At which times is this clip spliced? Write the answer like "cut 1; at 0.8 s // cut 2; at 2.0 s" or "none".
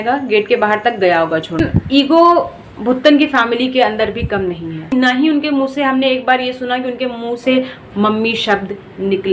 cut 1; at 1.6 s // cut 2; at 4.9 s